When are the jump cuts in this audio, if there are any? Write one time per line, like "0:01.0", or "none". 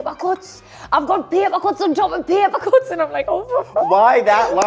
none